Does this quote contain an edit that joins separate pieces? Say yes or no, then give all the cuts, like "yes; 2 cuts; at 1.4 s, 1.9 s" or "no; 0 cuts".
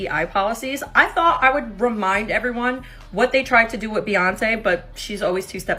no; 0 cuts